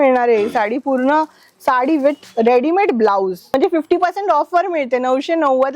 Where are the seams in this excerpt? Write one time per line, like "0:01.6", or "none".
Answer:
0:03.5